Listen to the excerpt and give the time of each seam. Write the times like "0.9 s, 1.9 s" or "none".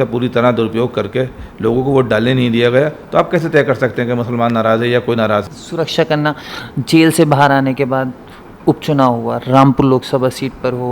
5.6 s